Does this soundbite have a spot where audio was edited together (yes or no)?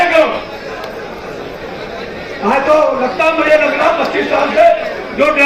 no